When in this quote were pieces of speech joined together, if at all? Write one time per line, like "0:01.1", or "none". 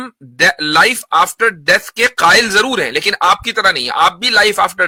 none